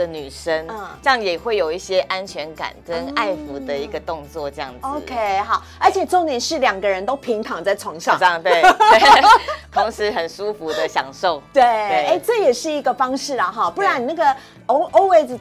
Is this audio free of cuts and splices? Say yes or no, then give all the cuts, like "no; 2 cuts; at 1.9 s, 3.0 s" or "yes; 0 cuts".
yes; 0 cuts